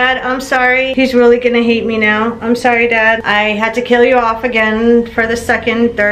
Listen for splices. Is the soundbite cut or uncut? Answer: cut